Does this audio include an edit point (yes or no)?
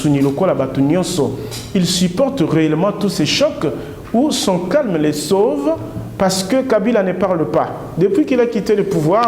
no